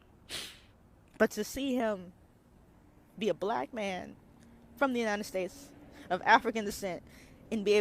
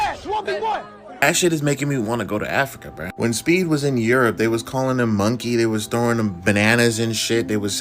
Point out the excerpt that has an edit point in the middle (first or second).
second